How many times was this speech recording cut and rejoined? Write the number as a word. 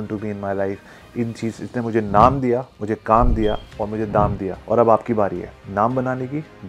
one